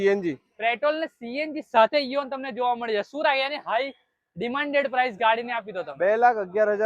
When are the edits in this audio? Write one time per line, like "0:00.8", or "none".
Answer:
none